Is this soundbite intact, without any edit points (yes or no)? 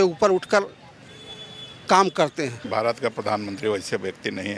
no